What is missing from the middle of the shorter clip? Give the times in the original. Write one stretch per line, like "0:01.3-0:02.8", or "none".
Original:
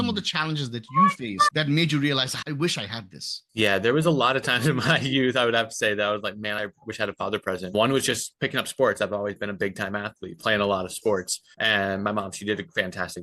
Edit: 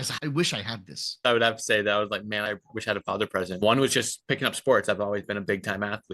0:03.5-0:05.3